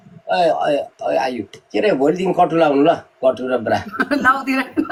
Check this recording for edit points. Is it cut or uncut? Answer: uncut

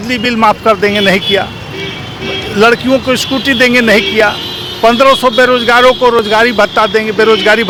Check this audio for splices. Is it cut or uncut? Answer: uncut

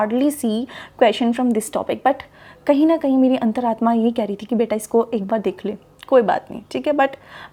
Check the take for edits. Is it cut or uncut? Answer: uncut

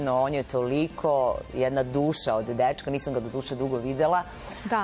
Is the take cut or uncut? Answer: uncut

